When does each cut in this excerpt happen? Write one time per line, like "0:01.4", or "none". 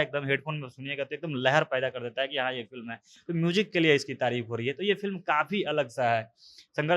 none